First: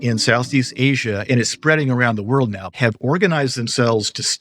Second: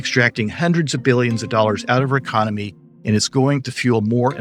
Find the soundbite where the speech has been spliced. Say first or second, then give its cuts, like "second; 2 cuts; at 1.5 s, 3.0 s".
first; 1 cut; at 2.7 s